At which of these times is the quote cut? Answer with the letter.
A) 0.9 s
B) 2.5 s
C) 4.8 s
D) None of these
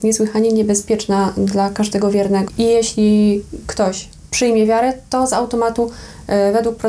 B